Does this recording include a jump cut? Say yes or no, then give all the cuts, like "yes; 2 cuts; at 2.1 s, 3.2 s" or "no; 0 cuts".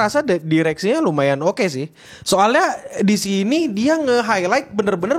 no; 0 cuts